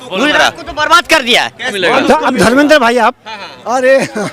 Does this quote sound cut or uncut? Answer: cut